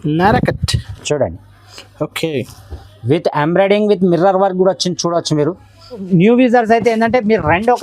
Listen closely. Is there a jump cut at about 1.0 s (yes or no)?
no